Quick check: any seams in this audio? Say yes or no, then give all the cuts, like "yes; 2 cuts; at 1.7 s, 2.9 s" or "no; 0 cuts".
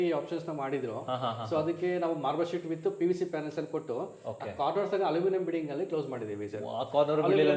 no; 0 cuts